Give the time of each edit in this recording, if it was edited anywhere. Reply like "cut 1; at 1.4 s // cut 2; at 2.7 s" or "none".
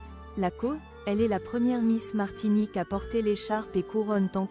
cut 1; at 0.9 s